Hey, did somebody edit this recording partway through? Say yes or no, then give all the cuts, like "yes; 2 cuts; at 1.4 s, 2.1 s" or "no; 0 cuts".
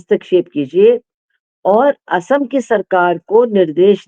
no; 0 cuts